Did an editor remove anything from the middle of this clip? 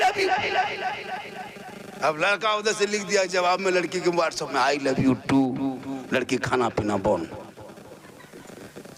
no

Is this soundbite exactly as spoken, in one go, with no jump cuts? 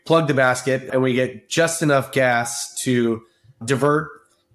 no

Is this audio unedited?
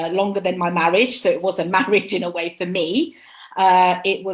yes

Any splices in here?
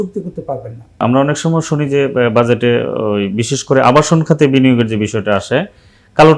yes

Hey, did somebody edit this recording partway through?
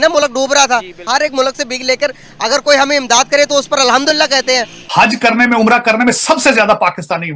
yes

